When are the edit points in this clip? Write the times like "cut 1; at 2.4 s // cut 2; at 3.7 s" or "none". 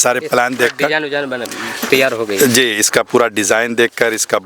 cut 1; at 1.7 s